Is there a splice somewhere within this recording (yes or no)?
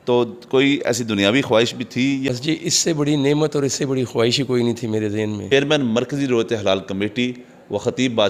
yes